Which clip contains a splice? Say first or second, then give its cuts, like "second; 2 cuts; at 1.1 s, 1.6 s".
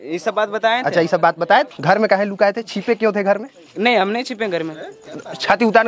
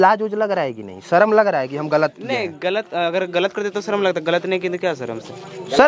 first; 1 cut; at 1.7 s